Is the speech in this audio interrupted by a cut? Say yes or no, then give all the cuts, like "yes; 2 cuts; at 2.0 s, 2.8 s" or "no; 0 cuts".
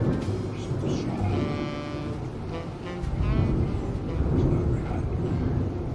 no; 0 cuts